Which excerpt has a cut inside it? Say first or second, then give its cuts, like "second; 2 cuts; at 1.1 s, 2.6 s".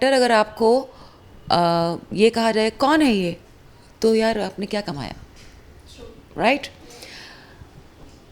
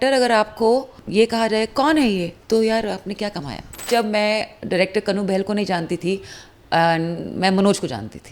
second; 3 cuts; at 1.0 s, 2.3 s, 3.9 s